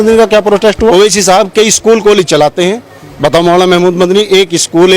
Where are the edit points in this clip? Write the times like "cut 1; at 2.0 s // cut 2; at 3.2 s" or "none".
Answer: cut 1; at 0.9 s